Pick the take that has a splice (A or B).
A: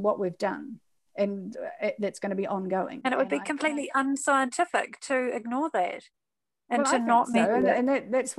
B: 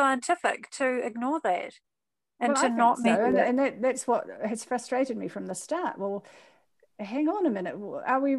A